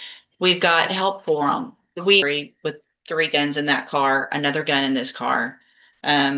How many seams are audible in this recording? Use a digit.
1